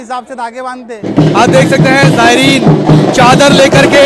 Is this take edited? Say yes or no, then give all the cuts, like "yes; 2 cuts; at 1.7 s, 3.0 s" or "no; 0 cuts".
yes; 1 cut; at 1.1 s